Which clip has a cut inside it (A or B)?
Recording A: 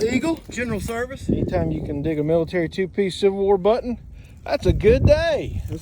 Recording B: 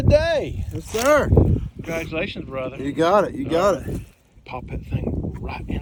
A